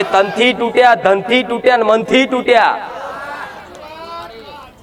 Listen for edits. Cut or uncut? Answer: uncut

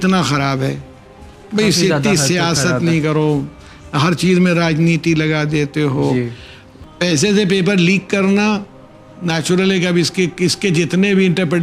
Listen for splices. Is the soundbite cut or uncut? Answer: cut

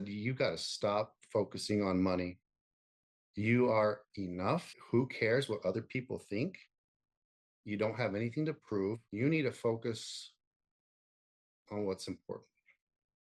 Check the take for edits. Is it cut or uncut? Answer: cut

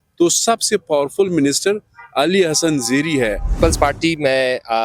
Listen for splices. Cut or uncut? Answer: cut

